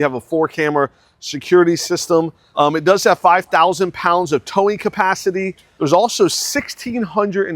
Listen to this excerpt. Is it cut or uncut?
cut